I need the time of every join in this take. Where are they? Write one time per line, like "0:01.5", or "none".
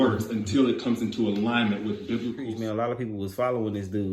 0:02.4